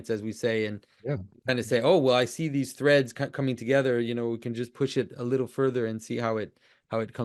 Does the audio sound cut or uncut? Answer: uncut